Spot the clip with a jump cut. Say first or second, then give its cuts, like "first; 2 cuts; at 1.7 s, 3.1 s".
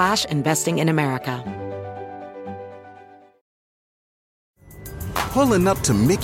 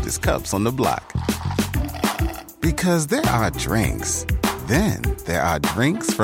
first; 1 cut; at 1.4 s